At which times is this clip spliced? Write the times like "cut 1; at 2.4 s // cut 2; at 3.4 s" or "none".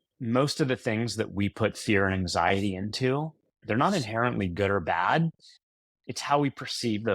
cut 1; at 3.6 s